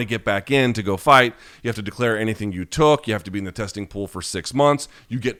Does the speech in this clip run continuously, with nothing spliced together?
yes; 0 cuts

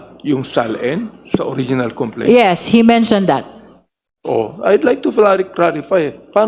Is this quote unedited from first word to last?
yes; 0 cuts

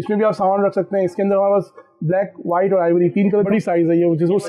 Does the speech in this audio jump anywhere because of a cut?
yes; 1 cut; at 3.5 s

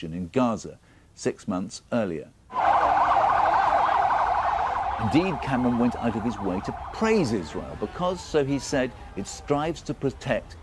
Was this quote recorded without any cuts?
no; 1 cut; at 1.7 s

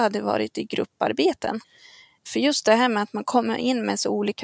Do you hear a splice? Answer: yes; 1 cut; at 2.3 s

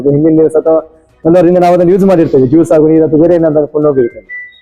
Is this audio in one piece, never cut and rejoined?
yes; 0 cuts

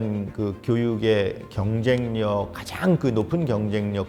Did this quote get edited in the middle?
no; 0 cuts

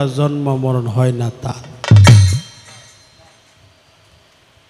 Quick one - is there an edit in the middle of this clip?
no; 0 cuts

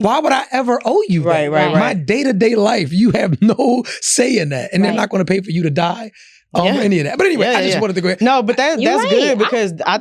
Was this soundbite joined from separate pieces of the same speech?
no; 0 cuts

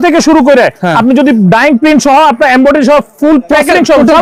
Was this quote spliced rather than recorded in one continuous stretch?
no; 0 cuts

